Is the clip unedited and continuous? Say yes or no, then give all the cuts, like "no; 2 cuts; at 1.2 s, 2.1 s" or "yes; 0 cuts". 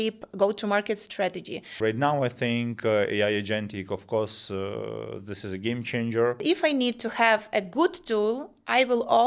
no; 2 cuts; at 1.8 s, 6.4 s